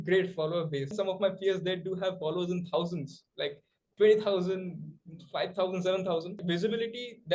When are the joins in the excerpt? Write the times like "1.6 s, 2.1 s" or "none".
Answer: 0.9 s, 6.4 s